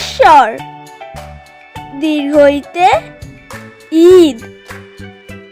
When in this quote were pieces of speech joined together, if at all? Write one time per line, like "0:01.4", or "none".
0:04.4